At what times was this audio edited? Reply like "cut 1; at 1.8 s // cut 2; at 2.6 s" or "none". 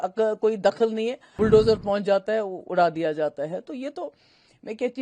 cut 1; at 1.2 s